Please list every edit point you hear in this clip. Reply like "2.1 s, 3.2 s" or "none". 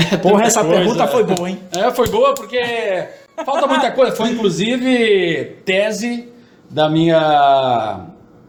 none